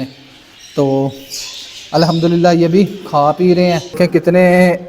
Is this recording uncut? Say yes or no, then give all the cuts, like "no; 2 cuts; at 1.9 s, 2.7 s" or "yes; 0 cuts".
no; 1 cut; at 3.9 s